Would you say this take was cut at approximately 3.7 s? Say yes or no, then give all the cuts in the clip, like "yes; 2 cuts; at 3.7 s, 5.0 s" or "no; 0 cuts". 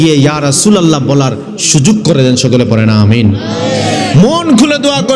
no; 0 cuts